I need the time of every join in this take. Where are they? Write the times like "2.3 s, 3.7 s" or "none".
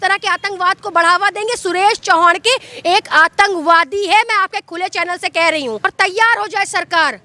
5.9 s